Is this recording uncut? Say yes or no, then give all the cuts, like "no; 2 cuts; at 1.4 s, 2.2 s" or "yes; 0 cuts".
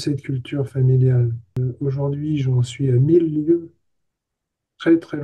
no; 1 cut; at 1.6 s